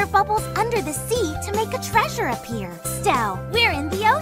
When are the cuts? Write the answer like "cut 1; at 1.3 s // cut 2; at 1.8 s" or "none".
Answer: cut 1; at 2.9 s